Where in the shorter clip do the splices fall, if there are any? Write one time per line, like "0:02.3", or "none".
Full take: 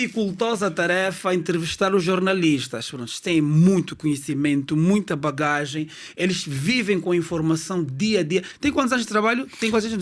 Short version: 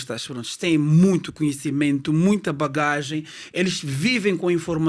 none